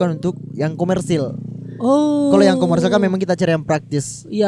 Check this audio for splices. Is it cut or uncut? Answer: uncut